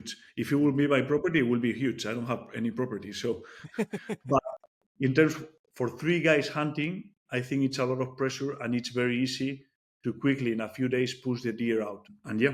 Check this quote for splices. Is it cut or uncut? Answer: uncut